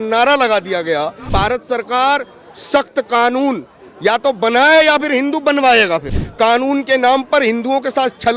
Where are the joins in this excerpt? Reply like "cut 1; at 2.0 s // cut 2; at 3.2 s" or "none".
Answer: cut 1; at 1.2 s // cut 2; at 6.2 s